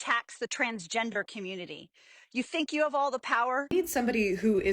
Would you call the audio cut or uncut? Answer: cut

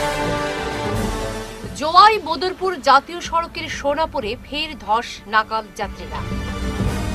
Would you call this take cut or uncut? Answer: uncut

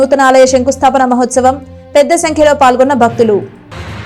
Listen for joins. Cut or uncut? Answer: uncut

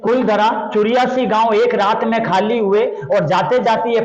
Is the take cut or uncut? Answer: uncut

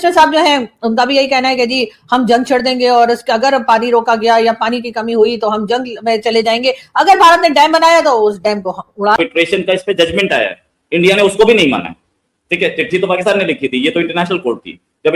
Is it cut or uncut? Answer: cut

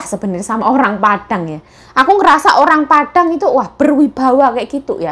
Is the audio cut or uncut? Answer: uncut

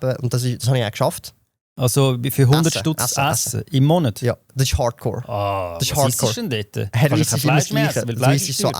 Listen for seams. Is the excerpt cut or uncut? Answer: uncut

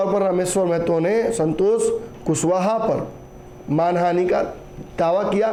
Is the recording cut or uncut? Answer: uncut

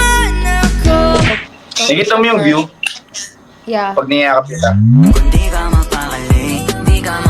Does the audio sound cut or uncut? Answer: cut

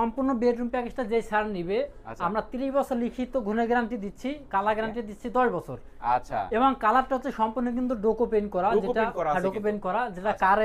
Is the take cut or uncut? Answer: uncut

